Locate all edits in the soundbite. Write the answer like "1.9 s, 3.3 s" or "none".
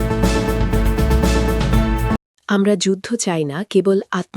2.1 s